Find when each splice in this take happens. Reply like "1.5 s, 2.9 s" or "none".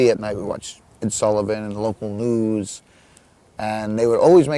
2.1 s